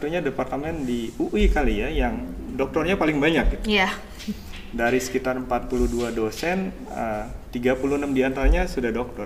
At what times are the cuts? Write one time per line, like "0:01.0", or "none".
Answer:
none

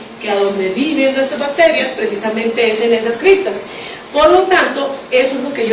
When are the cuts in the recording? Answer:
none

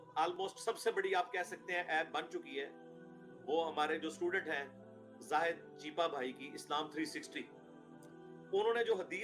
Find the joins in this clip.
none

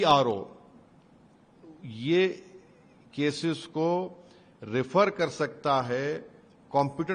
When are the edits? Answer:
none

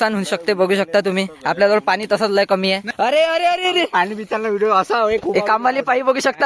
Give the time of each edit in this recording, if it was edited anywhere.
0:02.9

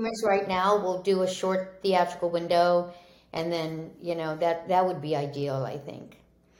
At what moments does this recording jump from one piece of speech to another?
none

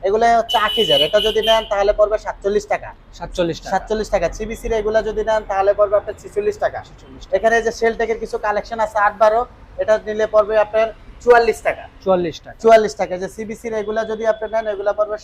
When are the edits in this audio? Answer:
none

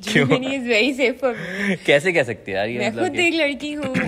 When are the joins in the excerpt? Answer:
none

